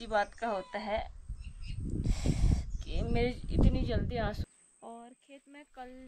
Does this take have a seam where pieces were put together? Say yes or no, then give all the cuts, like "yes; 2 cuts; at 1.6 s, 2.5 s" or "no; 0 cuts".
yes; 1 cut; at 4.4 s